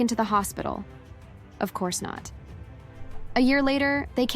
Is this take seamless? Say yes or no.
no